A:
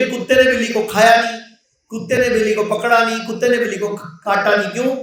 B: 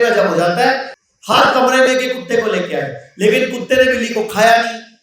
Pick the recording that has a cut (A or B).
B